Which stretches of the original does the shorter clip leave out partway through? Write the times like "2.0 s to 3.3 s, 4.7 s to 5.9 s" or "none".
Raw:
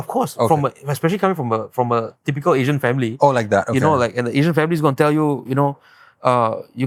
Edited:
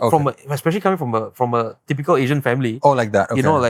none